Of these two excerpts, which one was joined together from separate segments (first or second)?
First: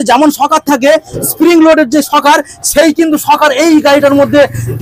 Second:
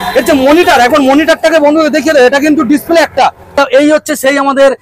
second